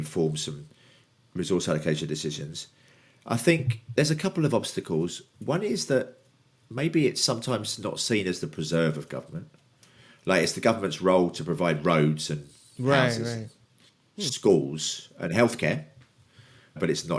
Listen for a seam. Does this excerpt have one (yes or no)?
no